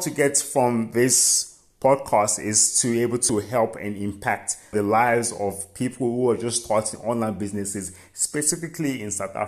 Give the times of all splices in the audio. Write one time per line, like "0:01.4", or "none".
0:03.2
0:04.7